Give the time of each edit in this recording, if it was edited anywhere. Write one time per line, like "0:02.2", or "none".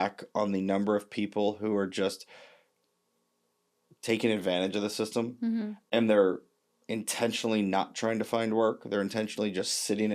none